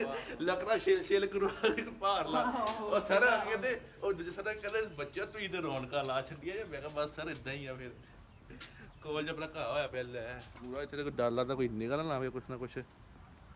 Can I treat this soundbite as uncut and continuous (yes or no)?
yes